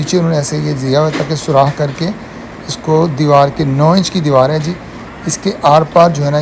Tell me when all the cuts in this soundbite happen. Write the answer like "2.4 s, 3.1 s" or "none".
none

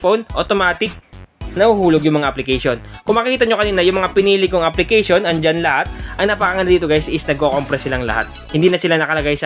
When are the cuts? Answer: 6.0 s, 8.3 s

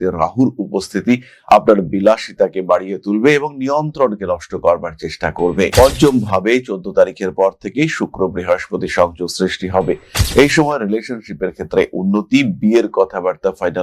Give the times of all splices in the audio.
none

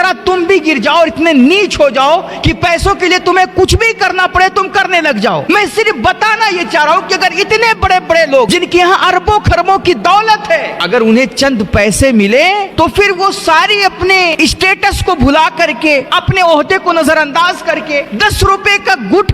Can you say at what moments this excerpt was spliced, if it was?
5.5 s, 8.5 s, 10.7 s, 12.7 s, 14.3 s, 18.1 s

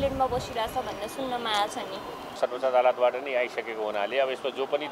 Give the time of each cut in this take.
2.4 s

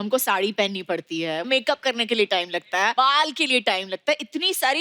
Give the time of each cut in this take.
1.5 s, 2.9 s

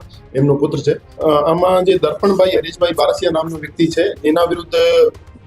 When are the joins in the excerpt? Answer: 1.1 s

